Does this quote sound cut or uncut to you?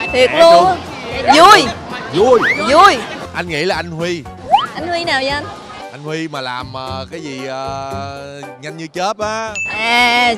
uncut